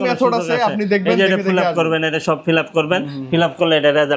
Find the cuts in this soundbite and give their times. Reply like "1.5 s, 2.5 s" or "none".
none